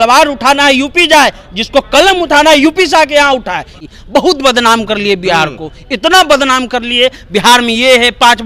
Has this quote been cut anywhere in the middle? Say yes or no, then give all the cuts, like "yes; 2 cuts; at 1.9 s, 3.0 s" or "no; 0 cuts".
yes; 1 cut; at 3.7 s